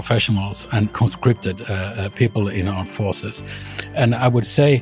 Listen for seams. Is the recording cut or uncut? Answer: cut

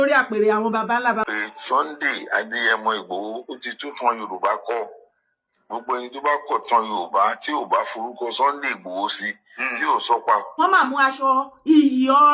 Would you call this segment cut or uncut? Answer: cut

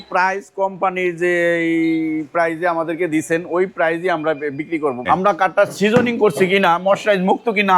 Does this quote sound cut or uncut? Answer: cut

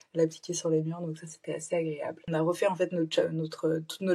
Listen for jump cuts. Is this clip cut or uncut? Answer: cut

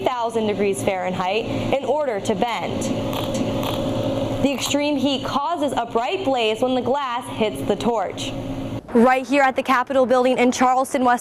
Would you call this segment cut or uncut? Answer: cut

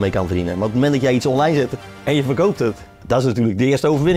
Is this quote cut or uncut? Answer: cut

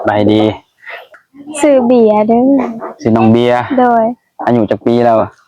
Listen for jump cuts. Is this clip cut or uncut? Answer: cut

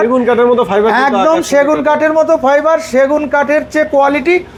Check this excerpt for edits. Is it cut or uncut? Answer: uncut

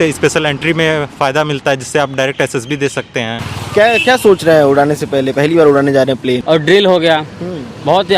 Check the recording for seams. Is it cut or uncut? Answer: cut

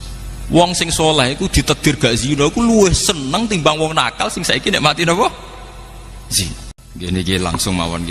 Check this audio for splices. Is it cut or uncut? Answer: cut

